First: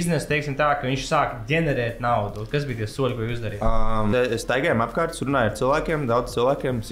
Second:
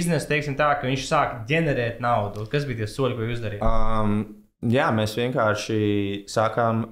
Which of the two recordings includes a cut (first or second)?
first